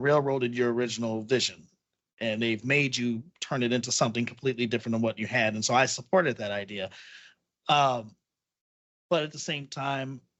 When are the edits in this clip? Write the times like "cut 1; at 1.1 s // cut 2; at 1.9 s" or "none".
none